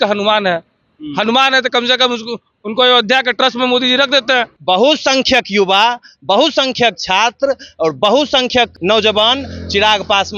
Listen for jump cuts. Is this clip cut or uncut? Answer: cut